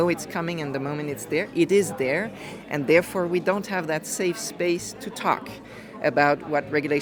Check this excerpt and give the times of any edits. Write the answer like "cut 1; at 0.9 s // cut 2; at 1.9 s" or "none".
none